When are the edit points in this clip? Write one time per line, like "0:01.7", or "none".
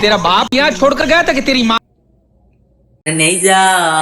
0:03.1